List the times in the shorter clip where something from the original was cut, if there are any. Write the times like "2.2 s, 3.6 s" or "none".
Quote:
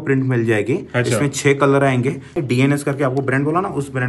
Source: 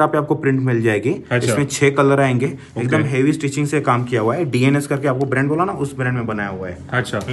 2.8 s

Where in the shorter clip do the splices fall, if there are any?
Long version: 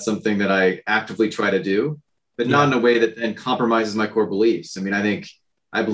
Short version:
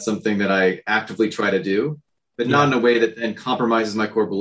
none

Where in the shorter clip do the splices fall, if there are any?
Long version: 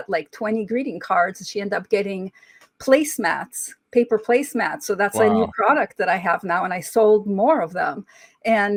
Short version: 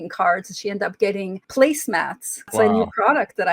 1.4 s, 2.5 s

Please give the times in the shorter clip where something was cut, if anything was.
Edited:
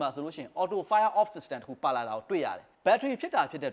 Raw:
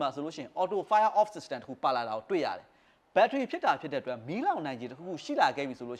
2.7 s

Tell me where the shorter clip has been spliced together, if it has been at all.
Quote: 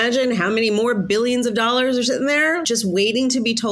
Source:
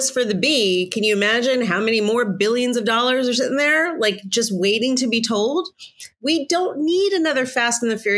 2.6 s

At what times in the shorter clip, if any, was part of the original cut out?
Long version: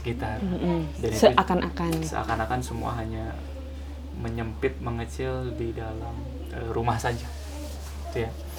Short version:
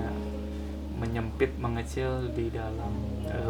none

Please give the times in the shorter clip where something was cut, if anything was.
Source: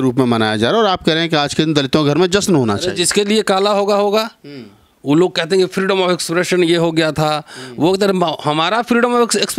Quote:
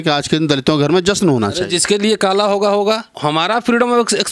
3.2 s

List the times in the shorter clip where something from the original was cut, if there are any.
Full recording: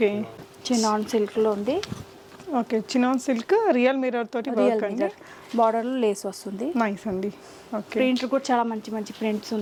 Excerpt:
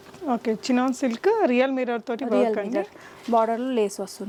none

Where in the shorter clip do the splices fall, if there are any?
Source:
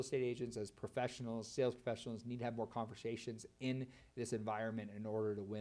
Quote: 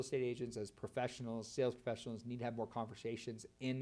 none

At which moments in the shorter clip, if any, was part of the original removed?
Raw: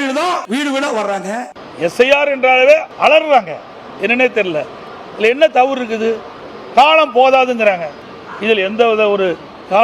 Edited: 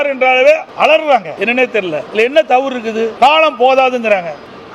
1.7 s, 3.1 s

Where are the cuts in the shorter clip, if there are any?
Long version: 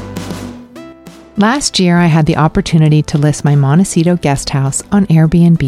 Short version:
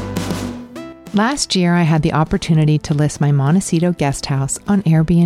1.0 s

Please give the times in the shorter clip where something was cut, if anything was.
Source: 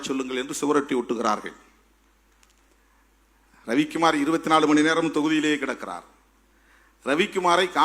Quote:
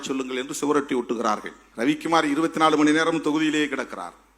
1.6 s

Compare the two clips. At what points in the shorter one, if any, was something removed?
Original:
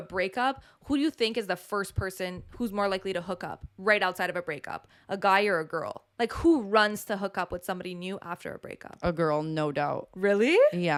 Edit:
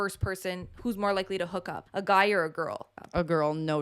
1.8 s, 2.9 s

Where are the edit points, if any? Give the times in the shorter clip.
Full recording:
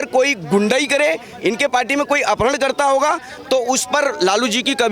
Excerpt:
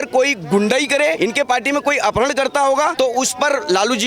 1.2 s, 2.9 s

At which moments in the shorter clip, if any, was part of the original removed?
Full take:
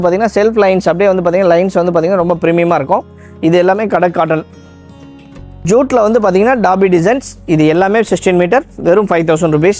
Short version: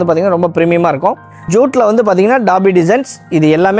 1.3 s

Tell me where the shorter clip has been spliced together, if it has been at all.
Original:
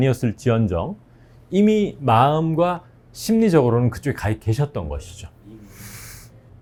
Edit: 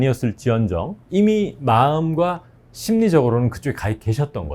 1.0 s

